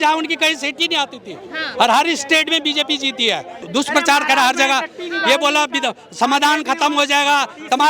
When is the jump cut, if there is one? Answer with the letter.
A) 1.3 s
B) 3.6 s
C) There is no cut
B